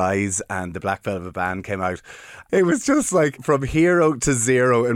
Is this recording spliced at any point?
yes; 2 cuts; at 2.4 s, 3.4 s

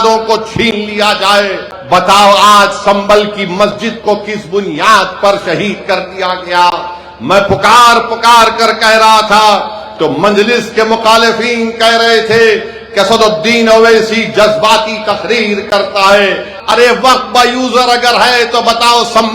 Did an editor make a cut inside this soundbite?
yes; 2 cuts; at 1.7 s, 16.5 s

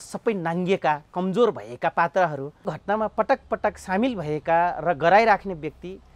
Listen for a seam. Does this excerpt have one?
yes; 1 cut; at 2.7 s

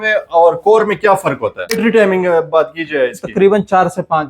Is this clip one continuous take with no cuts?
no; 1 cut; at 1.7 s

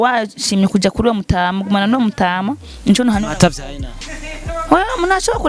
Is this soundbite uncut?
yes; 0 cuts

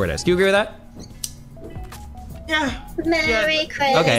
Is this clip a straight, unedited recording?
yes; 0 cuts

